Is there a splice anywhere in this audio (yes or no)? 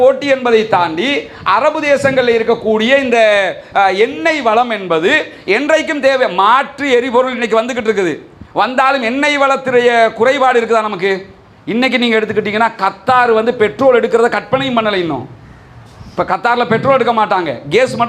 no